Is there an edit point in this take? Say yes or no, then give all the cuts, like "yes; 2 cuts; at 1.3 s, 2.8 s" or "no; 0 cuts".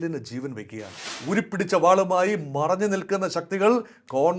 yes; 1 cut; at 1.1 s